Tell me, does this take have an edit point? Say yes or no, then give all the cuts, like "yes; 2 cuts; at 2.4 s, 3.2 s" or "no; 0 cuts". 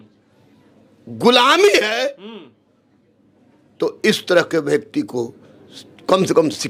no; 0 cuts